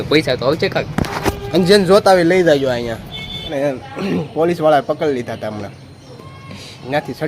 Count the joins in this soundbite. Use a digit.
1